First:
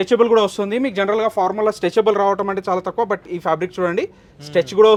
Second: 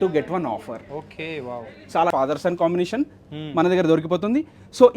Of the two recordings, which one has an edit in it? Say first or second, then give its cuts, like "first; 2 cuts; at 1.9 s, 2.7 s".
second; 1 cut; at 2.1 s